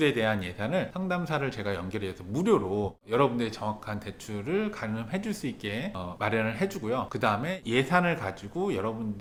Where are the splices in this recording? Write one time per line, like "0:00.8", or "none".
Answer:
none